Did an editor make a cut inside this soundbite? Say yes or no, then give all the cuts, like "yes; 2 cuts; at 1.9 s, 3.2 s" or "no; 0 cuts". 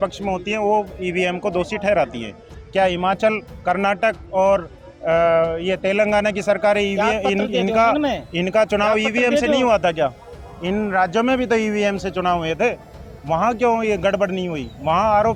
no; 0 cuts